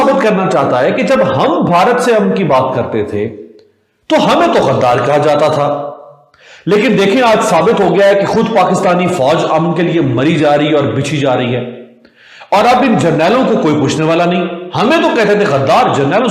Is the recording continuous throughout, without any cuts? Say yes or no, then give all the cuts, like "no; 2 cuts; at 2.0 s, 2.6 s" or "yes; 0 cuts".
yes; 0 cuts